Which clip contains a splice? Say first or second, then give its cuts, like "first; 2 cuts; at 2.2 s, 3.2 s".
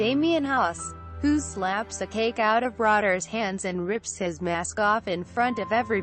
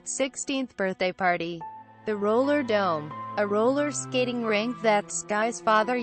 second; 1 cut; at 4.5 s